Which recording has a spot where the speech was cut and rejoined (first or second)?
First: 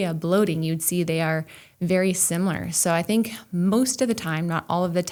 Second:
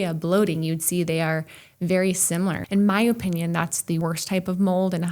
second